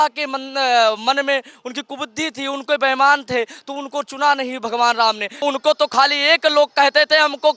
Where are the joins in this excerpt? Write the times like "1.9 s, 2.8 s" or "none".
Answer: 5.4 s